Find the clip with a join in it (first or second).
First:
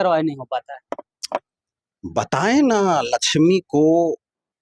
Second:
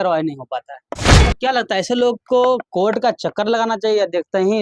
second